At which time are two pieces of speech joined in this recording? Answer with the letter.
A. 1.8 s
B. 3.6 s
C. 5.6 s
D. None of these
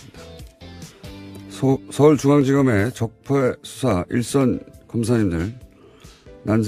B